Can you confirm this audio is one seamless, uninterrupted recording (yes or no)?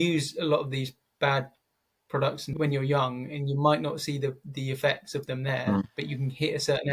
no